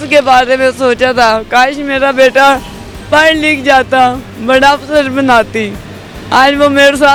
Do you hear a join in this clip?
no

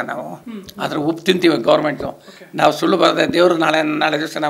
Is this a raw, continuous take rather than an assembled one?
yes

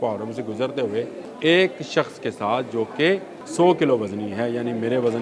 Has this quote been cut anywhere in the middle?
yes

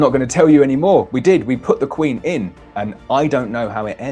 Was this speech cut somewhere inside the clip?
no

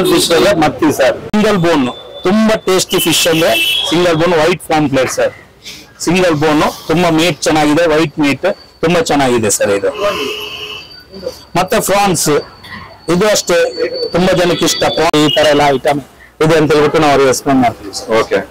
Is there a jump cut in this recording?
yes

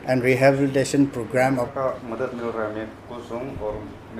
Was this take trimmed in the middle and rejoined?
yes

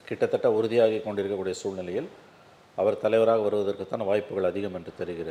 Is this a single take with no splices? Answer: yes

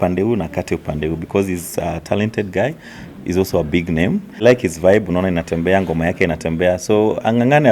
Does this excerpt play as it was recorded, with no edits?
no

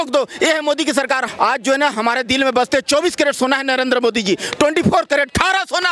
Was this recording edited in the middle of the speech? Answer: yes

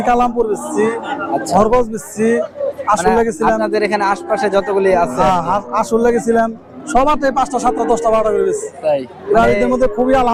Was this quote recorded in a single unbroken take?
yes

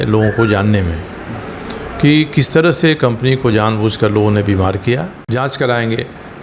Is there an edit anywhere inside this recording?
yes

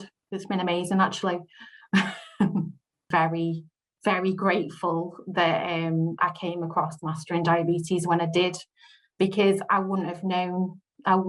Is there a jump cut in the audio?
yes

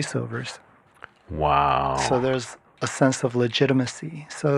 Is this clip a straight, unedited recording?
yes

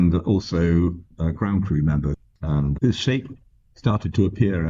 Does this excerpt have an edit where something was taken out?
yes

